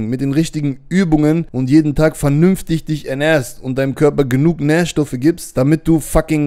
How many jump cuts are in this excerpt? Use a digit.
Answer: 2